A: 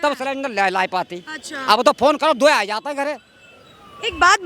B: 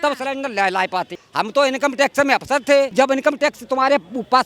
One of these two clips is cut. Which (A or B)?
B